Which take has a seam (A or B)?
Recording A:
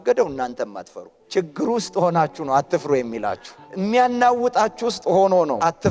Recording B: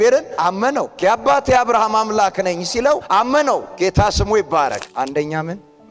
B